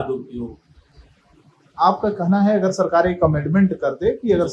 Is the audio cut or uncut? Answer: uncut